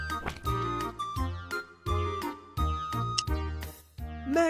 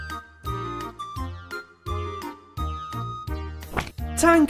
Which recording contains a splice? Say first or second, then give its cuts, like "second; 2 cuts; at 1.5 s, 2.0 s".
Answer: second; 1 cut; at 3.6 s